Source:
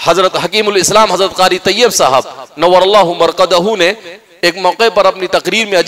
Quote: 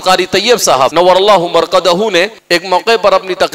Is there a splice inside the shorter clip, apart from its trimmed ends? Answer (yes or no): yes